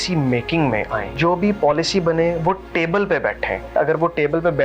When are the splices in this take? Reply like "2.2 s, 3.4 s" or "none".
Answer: 1.0 s, 3.7 s